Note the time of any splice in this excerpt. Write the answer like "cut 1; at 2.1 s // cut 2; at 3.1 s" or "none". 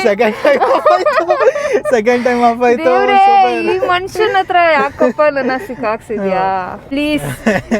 cut 1; at 6.8 s